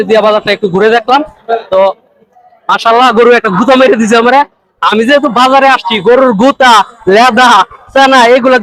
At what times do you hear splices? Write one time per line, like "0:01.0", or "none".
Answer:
none